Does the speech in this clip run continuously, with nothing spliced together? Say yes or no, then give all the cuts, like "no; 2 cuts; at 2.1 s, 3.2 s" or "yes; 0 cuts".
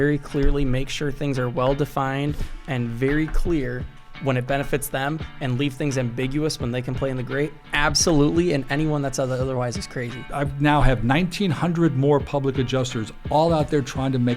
no; 1 cut; at 10.2 s